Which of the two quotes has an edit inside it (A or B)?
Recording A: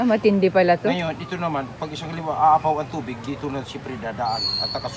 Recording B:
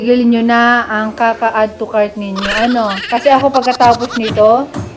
B